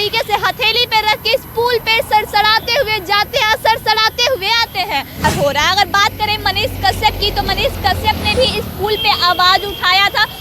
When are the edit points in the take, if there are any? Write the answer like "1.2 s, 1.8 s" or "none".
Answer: 5.2 s